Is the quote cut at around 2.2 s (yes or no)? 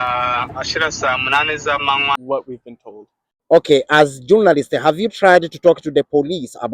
yes